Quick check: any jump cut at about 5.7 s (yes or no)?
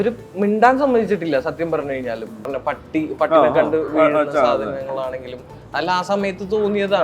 no